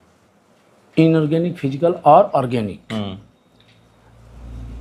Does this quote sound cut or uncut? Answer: uncut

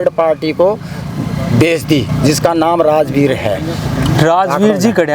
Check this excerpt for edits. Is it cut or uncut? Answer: uncut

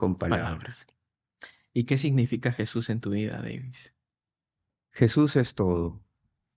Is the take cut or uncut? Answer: uncut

